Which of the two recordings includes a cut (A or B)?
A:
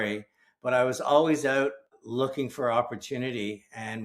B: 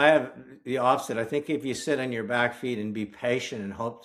A